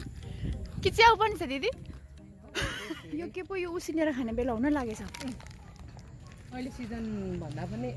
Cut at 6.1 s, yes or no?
no